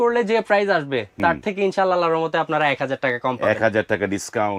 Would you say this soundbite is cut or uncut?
uncut